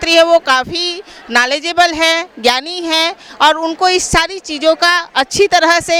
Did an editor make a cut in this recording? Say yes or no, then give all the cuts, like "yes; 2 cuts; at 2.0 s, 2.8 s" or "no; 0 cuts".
no; 0 cuts